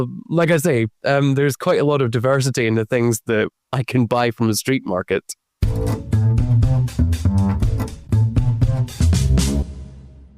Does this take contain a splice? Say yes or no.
yes